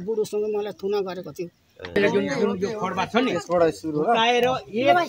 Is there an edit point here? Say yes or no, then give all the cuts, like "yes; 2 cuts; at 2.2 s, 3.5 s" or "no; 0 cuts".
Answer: yes; 1 cut; at 1.9 s